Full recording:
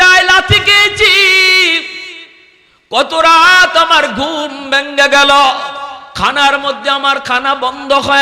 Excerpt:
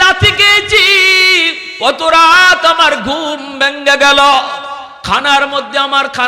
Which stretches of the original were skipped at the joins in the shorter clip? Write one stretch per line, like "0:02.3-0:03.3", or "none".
0:01.9-0:02.7